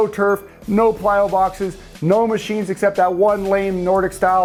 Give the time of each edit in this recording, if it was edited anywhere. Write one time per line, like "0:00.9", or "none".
none